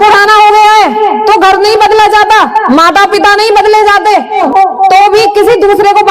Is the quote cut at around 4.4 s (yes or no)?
yes